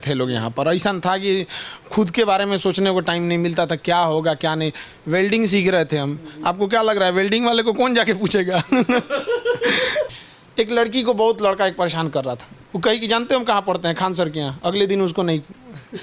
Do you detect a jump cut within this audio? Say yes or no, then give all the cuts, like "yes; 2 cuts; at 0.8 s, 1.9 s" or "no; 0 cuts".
yes; 1 cut; at 10.1 s